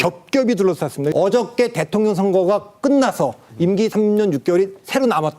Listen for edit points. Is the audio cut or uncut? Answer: cut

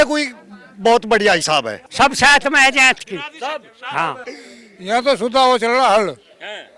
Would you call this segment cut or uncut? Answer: cut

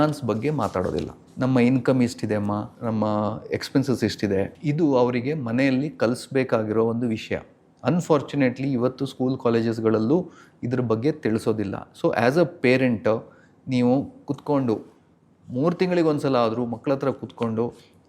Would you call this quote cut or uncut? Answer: cut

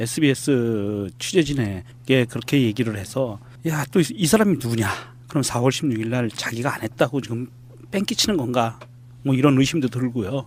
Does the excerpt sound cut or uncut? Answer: uncut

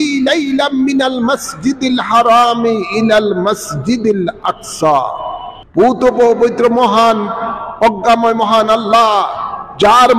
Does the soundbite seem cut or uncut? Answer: cut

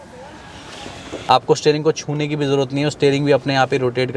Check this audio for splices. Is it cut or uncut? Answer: cut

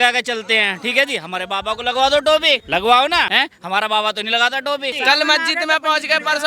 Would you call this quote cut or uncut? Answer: cut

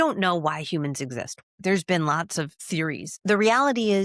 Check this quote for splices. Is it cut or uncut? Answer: cut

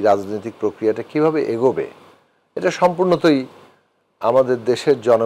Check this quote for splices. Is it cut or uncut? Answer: uncut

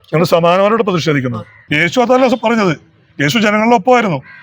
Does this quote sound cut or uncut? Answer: cut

